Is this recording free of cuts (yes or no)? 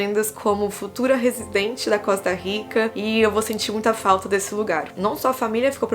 no